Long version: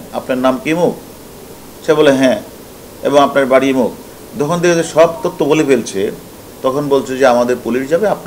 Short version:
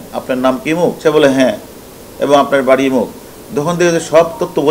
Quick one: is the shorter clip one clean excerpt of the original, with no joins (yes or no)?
no